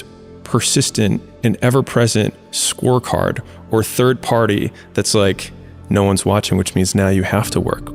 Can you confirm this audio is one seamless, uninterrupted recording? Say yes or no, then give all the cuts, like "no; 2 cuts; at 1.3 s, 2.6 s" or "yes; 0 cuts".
yes; 0 cuts